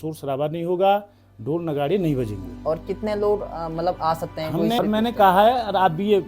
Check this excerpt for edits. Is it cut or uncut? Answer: cut